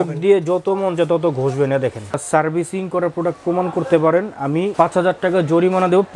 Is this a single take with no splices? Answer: no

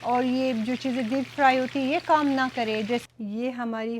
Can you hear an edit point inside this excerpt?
yes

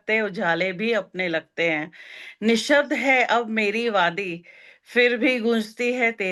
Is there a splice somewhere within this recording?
no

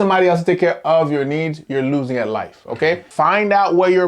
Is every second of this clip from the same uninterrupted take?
no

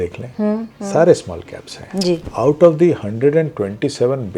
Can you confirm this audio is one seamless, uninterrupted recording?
no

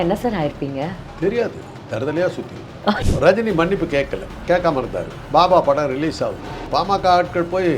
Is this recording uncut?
no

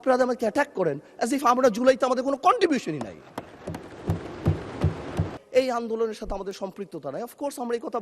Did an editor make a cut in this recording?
yes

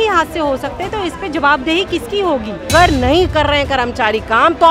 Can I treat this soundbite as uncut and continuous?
no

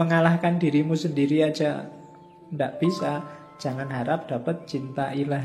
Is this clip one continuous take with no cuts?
yes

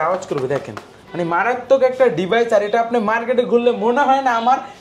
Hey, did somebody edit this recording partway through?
no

